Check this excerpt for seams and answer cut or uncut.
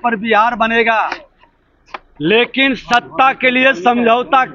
uncut